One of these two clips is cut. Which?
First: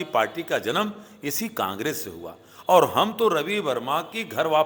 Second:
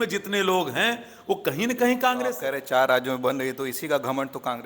second; 1 cut; at 2.3 s

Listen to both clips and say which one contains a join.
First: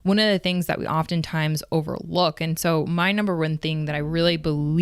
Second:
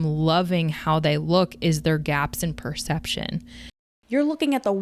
second; 1 cut; at 3.8 s

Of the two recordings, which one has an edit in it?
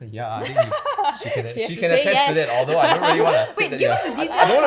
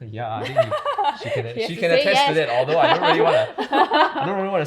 first; 1 cut; at 3.6 s

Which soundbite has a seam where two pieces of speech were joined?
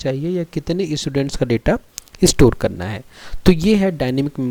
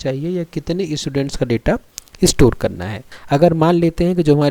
second; 1 cut; at 3.1 s

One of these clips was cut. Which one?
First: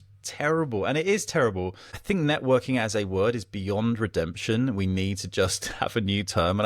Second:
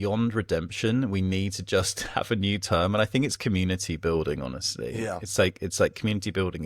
first; 1 cut; at 1.9 s

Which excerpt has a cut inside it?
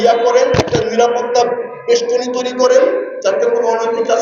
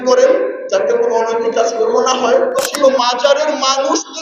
second; 1 cut; at 3.0 s

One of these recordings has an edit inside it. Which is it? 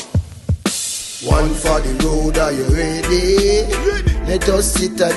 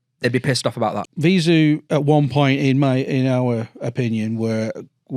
second; 1 cut; at 1.0 s

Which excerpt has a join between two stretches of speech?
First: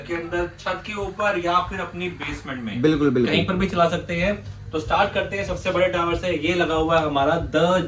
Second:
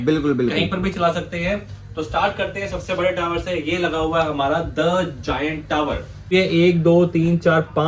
second; 1 cut; at 6.3 s

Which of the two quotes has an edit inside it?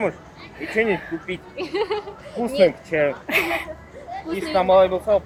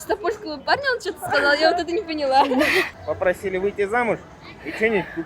second; 1 cut; at 2.9 s

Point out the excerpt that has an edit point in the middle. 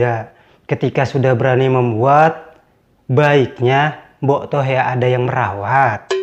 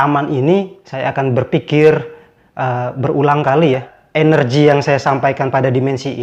second; 1 cut; at 4.0 s

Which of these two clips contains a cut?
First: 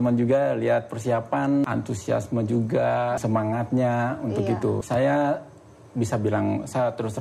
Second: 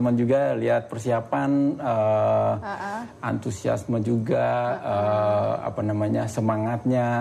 first; 3 cuts; at 1.6 s, 3.2 s, 4.8 s

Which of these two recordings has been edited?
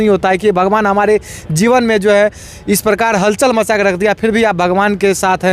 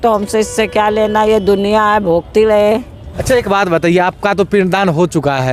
second; 1 cut; at 3.1 s

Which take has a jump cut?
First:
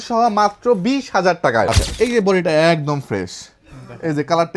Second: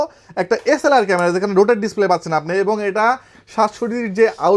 first; 1 cut; at 1.7 s

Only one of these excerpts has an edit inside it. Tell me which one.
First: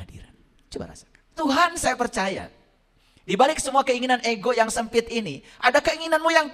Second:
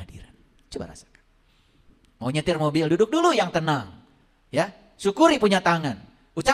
first; 1 cut; at 1.3 s

